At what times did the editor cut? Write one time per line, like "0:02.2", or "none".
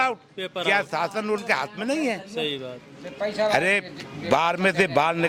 none

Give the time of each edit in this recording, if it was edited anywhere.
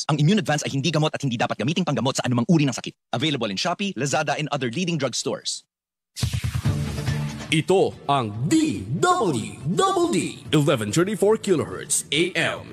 0:06.1

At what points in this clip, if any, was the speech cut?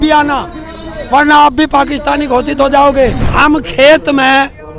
0:03.2

